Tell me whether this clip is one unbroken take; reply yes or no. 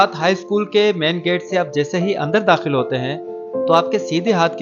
yes